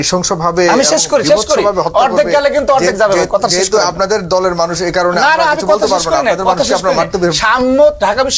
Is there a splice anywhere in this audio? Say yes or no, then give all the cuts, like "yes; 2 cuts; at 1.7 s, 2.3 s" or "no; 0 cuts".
no; 0 cuts